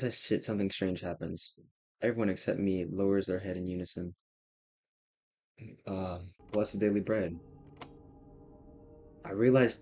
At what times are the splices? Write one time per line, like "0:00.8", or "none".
0:06.3